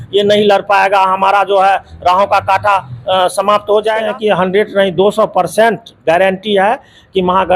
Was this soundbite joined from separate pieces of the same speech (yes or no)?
yes